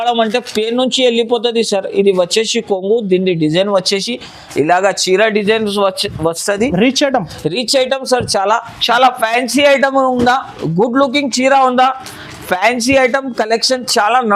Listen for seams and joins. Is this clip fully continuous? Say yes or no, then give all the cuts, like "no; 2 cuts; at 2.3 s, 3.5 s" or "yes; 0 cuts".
yes; 0 cuts